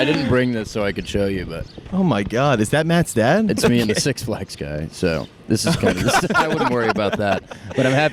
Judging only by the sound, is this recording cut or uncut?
uncut